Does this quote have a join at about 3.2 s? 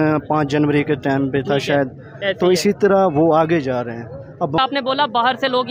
no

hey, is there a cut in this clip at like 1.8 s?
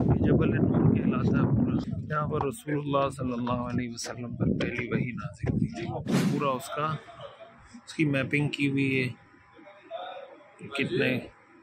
yes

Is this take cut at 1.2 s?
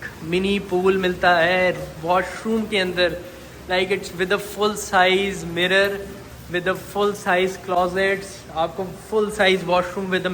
no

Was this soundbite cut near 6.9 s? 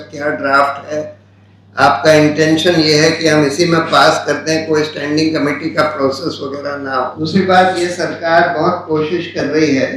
yes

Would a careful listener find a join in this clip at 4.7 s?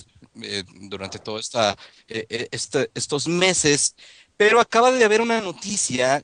yes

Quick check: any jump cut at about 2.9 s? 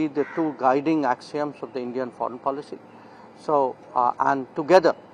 no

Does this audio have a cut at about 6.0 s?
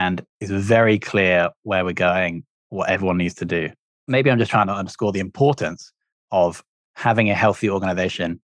no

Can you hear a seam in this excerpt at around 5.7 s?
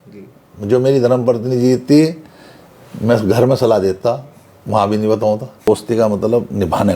yes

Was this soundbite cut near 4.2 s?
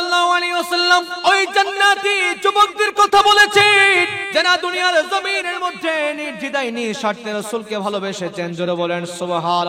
yes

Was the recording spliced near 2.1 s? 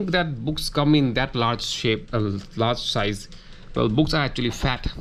no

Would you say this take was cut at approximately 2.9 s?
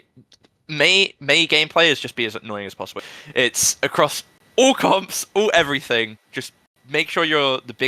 yes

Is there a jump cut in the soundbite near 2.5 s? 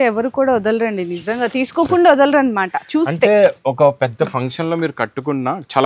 no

